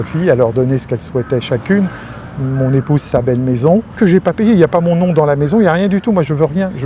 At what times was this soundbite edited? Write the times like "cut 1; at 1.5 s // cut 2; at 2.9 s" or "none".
none